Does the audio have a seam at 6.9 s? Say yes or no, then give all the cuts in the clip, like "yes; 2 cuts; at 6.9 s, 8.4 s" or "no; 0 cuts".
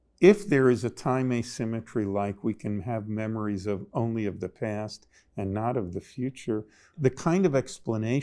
yes; 1 cut; at 6.9 s